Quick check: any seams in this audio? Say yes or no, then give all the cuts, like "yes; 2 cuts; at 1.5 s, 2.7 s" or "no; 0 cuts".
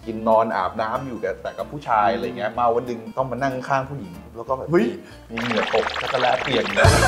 no; 0 cuts